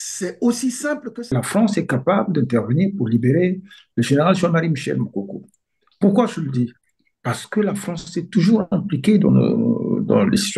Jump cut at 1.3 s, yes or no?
yes